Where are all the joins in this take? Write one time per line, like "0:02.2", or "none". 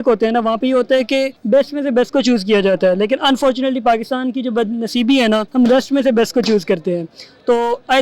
0:01.4
0:05.5